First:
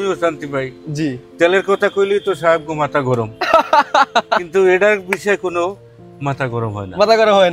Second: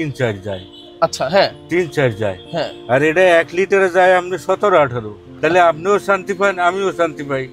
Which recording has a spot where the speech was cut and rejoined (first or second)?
second